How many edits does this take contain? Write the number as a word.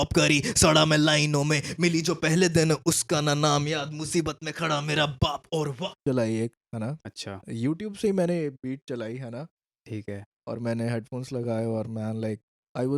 one